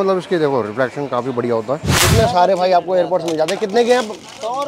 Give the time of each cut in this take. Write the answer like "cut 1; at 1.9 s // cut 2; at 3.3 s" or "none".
cut 1; at 2.0 s